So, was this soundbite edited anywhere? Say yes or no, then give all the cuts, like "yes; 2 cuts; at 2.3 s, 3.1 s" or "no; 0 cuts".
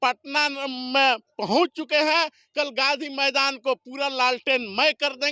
no; 0 cuts